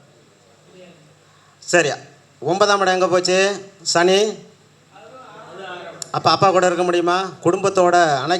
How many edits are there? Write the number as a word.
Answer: one